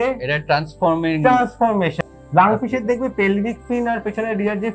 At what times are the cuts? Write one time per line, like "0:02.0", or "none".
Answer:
0:02.0